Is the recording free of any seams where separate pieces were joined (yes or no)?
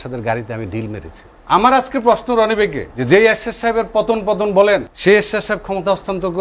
no